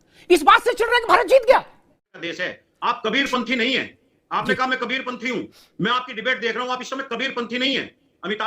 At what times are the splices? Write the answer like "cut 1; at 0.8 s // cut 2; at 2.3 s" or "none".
cut 1; at 2.2 s